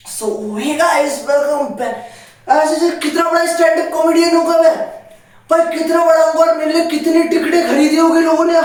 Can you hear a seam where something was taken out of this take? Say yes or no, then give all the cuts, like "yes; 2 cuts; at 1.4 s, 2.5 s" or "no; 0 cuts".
no; 0 cuts